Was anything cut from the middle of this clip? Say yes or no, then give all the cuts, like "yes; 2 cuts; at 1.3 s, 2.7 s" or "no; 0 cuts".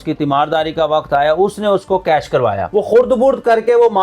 yes; 1 cut; at 2.6 s